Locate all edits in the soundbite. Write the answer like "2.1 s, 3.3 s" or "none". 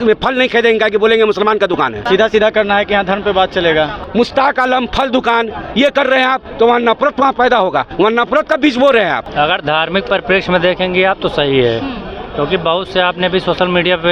2.0 s, 4.0 s, 9.2 s

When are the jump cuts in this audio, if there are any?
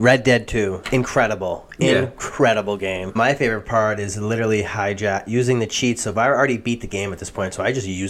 3.2 s

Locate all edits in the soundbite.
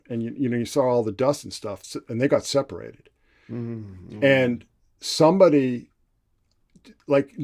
none

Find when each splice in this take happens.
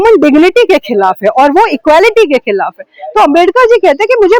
none

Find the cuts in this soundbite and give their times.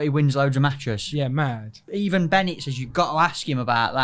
1.8 s

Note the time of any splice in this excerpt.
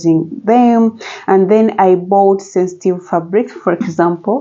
none

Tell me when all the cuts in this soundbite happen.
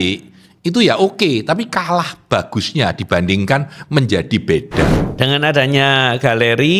5.0 s

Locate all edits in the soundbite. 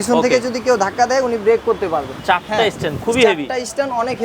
2.2 s

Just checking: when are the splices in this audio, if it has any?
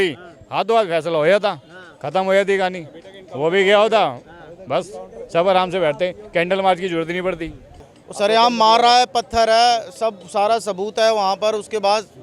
7.6 s

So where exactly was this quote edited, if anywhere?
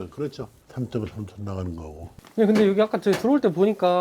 2.2 s

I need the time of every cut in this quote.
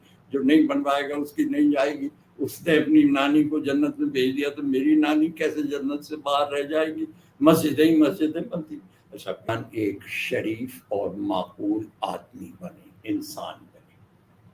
9.5 s

